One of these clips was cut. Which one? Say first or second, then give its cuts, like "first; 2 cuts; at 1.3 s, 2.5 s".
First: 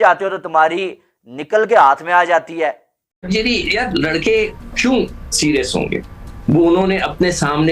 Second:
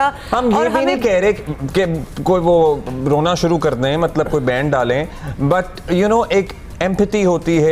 first; 1 cut; at 2.9 s